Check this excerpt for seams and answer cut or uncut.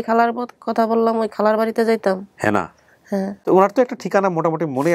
cut